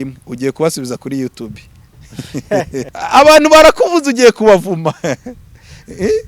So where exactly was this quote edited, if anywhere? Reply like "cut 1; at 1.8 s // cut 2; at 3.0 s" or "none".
cut 1; at 2.9 s